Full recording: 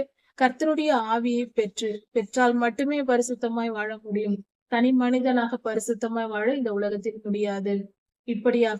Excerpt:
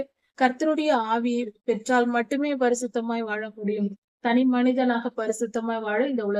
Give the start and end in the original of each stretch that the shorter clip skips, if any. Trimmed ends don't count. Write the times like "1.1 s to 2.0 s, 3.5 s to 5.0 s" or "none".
1.5 s to 2.0 s